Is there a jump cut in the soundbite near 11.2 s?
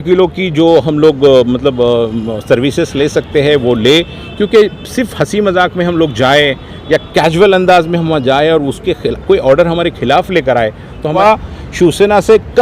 yes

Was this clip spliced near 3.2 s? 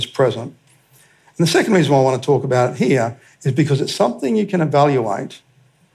no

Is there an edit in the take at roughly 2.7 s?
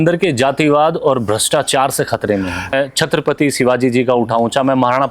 yes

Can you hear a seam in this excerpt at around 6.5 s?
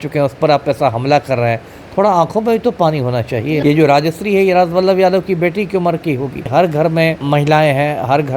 yes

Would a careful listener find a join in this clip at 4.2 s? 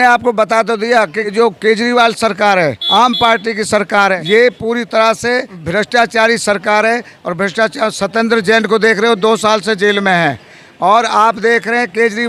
yes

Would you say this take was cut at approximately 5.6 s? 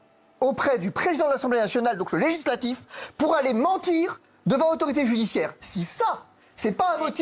no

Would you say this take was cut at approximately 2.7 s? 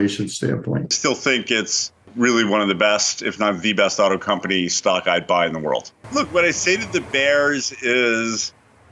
no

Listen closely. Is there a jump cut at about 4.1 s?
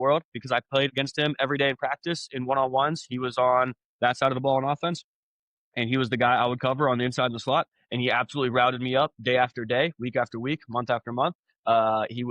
no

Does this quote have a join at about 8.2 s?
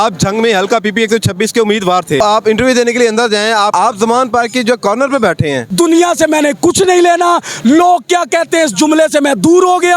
no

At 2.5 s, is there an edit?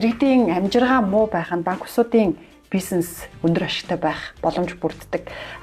no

